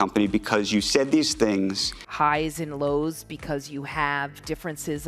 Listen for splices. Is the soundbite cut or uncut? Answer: cut